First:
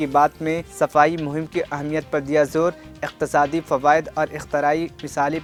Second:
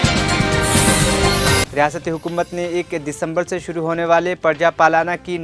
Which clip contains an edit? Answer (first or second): second